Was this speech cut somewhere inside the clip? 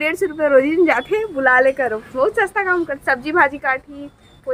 no; 0 cuts

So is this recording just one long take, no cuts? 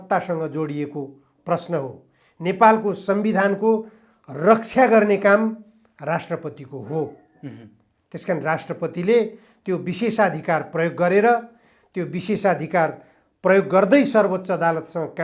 yes; 0 cuts

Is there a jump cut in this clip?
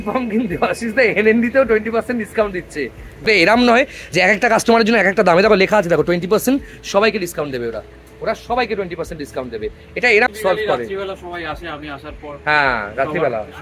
yes; 2 cuts; at 3.3 s, 10.0 s

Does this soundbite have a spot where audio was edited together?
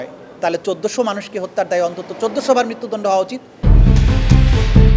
yes; 1 cut; at 3.7 s

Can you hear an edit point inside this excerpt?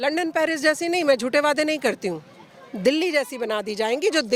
no; 0 cuts

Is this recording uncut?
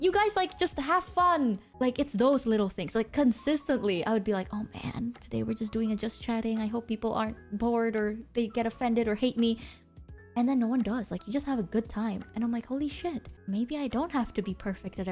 yes; 0 cuts

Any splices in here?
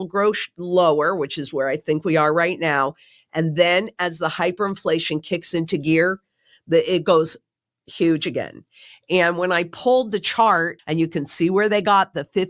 yes; 1 cut; at 10.7 s

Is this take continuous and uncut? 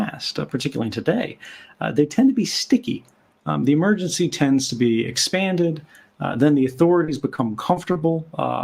yes; 0 cuts

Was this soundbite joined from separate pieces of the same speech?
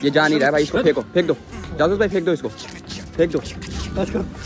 no; 0 cuts

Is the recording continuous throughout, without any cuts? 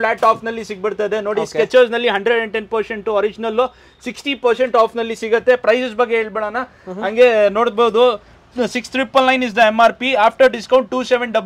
yes; 0 cuts

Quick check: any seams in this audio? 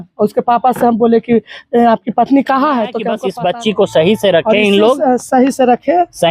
yes; 1 cut; at 3.1 s

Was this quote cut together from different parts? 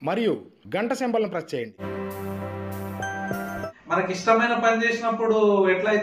yes; 2 cuts; at 1.8 s, 3.7 s

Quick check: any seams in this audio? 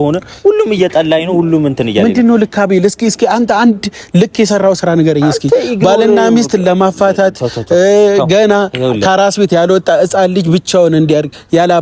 no; 0 cuts

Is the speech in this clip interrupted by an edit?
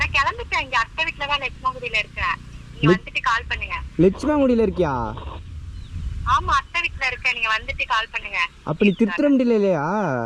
no; 0 cuts

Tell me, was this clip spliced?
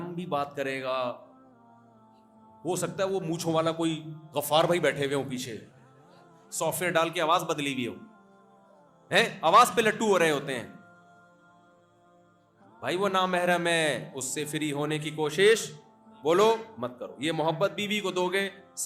yes; 2 cuts; at 1.3 s, 2.6 s

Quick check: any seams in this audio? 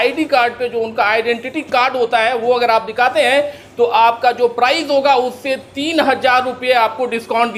no; 0 cuts

